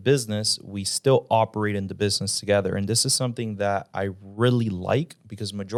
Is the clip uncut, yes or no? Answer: yes